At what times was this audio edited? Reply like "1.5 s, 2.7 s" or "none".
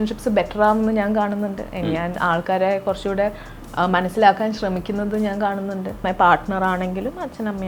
6.0 s

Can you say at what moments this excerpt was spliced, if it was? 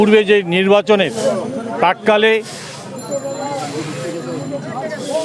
none

